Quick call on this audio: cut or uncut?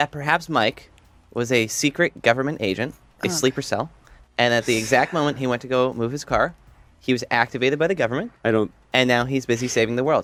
uncut